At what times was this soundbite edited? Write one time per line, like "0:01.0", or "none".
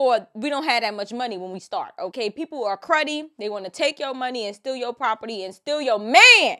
0:02.1